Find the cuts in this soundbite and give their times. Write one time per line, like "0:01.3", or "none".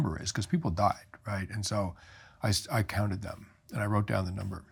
none